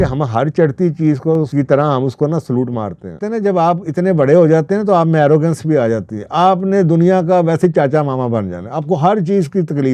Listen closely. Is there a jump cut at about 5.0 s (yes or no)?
no